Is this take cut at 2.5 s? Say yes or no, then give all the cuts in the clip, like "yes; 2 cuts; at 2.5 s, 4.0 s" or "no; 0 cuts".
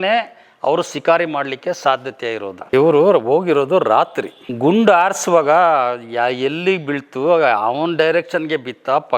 yes; 1 cut; at 2.5 s